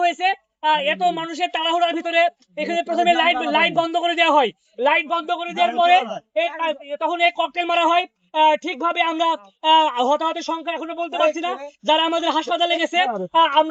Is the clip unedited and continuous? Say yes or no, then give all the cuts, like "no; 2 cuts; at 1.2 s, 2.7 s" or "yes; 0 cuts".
yes; 0 cuts